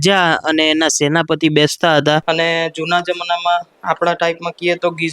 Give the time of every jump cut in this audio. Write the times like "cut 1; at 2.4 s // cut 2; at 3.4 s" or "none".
cut 1; at 2.2 s